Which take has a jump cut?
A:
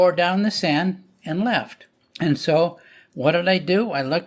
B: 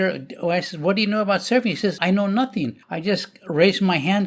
B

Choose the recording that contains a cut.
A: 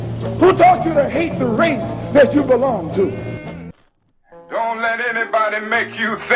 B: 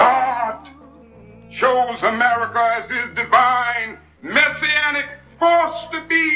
A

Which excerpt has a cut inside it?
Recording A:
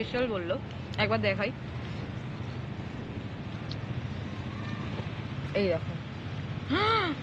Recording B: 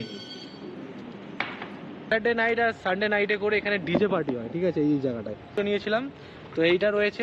B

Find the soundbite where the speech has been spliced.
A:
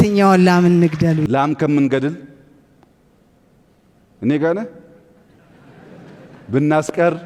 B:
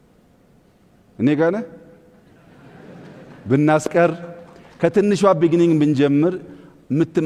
A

